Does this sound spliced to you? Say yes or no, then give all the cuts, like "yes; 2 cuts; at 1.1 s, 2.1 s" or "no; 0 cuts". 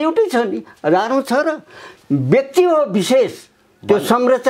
no; 0 cuts